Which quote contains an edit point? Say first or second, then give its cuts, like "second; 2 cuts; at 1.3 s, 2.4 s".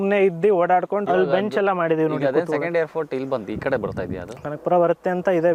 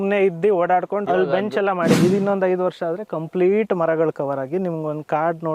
second; 1 cut; at 2.0 s